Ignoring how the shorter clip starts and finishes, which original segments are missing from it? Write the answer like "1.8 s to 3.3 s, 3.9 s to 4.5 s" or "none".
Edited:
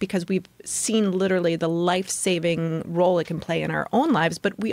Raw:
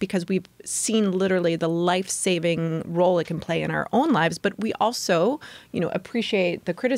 none